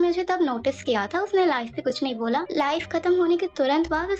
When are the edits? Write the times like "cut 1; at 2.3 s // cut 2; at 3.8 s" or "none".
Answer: none